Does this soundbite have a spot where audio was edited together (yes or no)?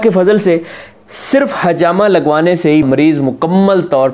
yes